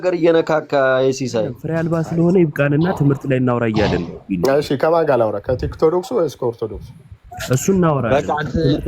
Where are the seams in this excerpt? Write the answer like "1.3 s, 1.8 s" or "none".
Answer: 1.6 s